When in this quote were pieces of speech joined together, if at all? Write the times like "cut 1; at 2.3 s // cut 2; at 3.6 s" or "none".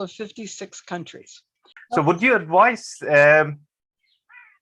cut 1; at 1.7 s